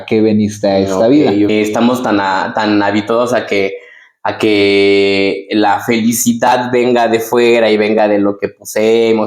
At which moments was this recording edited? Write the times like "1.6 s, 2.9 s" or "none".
1.5 s